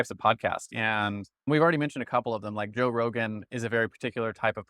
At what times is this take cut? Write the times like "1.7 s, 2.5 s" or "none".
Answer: 1.3 s